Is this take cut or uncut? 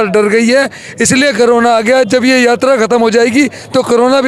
uncut